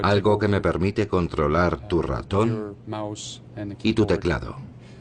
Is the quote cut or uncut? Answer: uncut